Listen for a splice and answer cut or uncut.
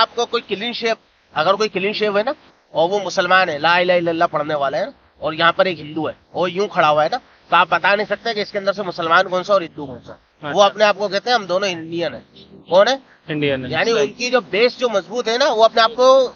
uncut